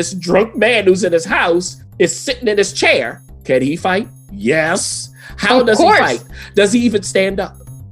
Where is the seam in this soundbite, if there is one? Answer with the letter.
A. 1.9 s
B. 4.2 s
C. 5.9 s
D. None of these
B